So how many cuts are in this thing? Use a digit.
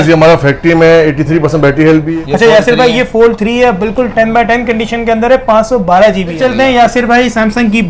2